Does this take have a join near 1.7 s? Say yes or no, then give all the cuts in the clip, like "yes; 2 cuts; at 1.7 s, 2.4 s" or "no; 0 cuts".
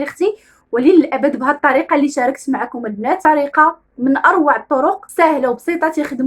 no; 2 cuts; at 3.2 s, 5.1 s